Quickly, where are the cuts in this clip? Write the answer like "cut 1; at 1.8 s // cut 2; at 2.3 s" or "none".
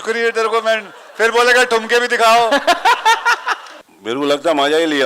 none